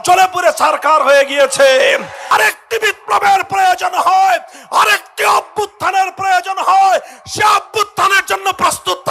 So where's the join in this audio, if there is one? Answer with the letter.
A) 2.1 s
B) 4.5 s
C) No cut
A